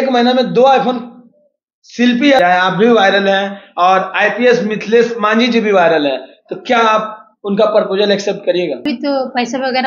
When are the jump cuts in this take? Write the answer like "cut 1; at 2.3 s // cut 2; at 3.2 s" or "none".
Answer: cut 1; at 2.4 s // cut 2; at 8.8 s